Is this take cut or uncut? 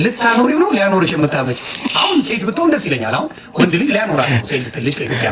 uncut